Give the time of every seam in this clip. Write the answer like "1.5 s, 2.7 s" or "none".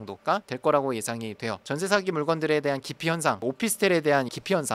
3.4 s